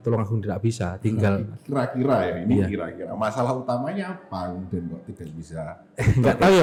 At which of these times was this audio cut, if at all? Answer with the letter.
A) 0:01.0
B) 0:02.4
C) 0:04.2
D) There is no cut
D